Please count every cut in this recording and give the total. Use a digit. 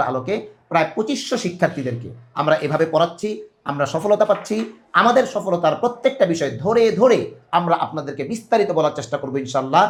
0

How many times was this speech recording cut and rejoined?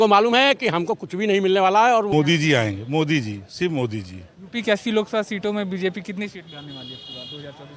1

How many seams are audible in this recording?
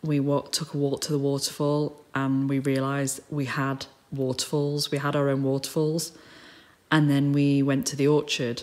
0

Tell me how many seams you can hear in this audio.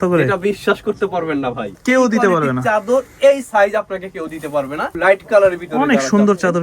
2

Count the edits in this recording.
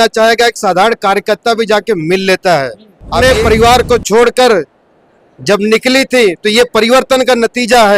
1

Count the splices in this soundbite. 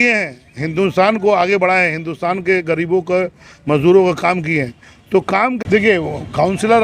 1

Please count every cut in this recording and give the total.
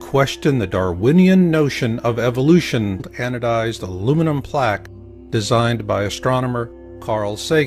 0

